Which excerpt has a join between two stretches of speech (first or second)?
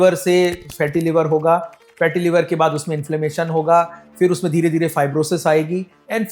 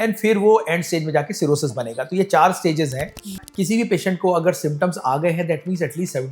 second